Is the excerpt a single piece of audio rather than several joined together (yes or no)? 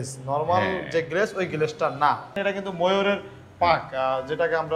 no